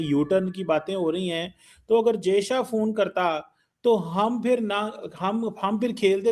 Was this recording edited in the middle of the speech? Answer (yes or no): no